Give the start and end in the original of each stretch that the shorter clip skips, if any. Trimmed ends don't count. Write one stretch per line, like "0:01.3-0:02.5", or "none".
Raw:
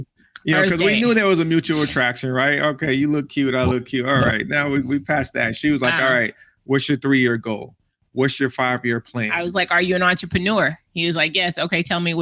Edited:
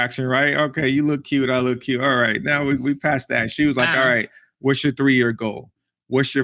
none